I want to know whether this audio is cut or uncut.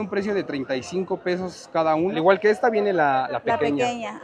cut